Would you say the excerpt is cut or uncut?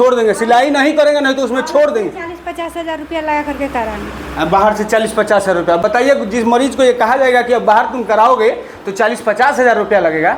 uncut